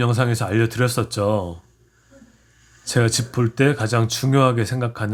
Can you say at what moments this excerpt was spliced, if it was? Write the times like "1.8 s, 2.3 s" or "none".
none

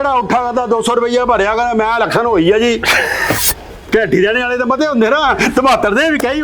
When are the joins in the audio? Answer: 3.4 s

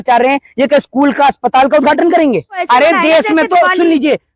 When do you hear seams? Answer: 2.6 s

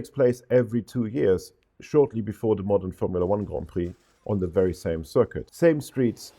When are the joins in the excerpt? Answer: 5.4 s

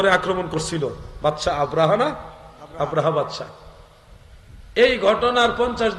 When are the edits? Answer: none

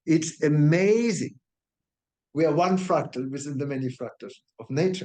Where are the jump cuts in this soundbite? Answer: 1.4 s

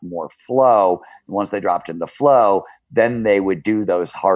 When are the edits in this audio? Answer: none

